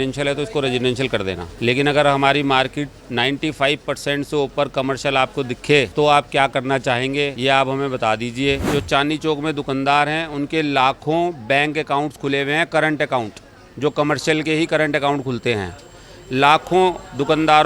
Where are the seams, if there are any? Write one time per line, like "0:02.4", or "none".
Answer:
0:01.5
0:05.9
0:07.3
0:08.6